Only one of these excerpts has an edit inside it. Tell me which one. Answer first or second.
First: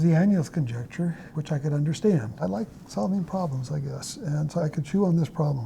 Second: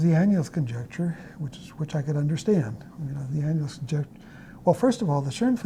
first